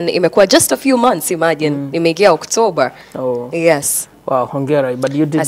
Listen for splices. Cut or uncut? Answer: uncut